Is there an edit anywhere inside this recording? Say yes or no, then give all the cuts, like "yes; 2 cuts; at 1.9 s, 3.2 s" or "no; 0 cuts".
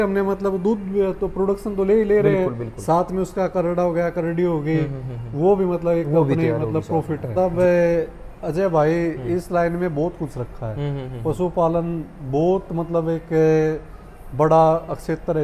yes; 1 cut; at 7.3 s